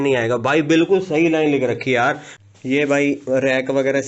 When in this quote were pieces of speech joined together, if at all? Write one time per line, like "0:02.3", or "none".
0:02.3